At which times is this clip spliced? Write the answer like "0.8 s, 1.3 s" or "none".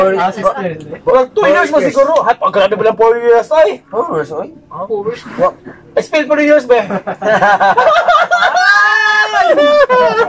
none